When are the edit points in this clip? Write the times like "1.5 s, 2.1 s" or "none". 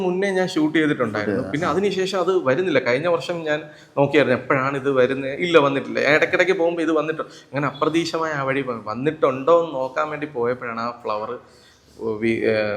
none